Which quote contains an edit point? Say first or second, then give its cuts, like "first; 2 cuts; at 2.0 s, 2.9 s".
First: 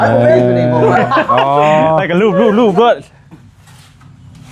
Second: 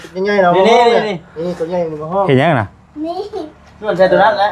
first; 1 cut; at 2.0 s